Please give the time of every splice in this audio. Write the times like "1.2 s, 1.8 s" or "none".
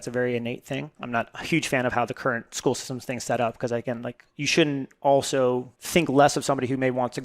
0.9 s, 5.7 s